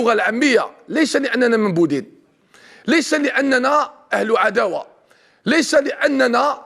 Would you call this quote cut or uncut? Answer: uncut